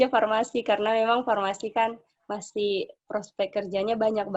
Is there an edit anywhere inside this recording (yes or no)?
no